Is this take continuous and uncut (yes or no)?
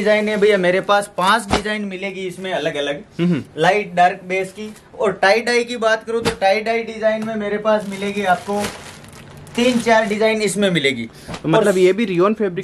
yes